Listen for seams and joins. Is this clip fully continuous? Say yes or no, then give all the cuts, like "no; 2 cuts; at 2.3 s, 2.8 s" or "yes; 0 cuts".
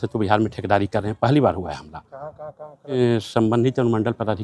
no; 1 cut; at 3.0 s